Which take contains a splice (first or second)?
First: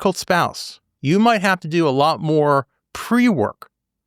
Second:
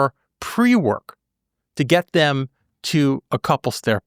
first